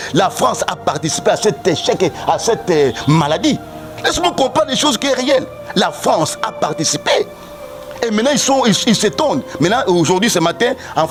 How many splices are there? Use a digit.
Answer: 0